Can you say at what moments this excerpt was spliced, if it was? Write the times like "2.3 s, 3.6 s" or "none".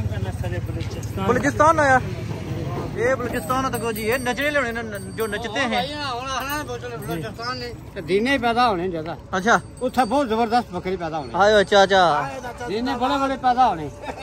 none